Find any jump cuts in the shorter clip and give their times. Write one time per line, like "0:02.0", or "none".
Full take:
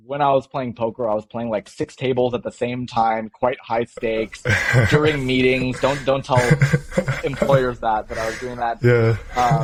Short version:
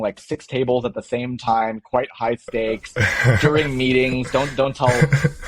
none